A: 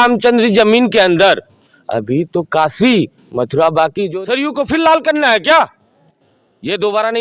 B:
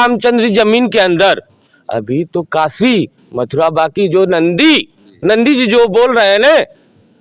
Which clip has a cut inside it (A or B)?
A